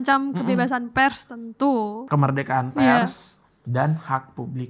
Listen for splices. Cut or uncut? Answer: cut